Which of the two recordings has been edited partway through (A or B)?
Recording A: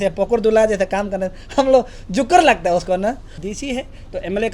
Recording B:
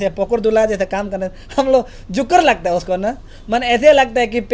A